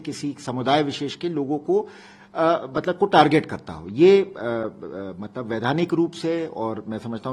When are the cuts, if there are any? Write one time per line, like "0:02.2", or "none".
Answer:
none

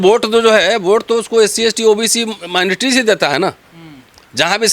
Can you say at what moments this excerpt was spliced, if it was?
none

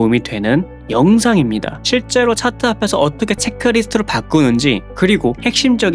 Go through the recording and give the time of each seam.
0:01.8

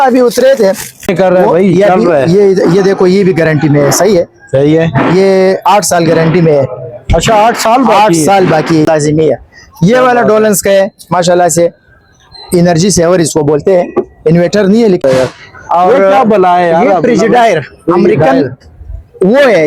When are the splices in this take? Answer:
0:01.1
0:08.9
0:15.0

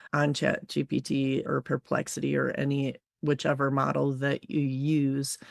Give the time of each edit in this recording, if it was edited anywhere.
none

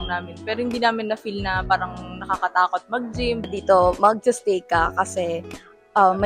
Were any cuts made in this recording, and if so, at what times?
0:03.5

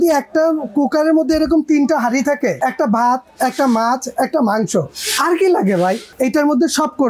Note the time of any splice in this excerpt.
0:02.6
0:06.1

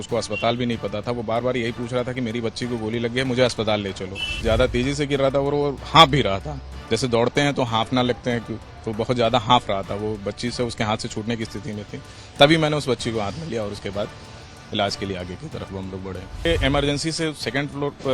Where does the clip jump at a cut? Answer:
0:04.3
0:16.4

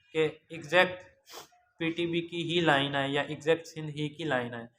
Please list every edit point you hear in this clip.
none

